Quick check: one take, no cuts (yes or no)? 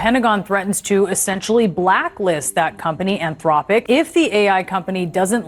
no